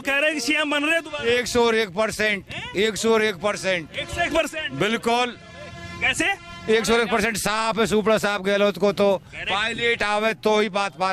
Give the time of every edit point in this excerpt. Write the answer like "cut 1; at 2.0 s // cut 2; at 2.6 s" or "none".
none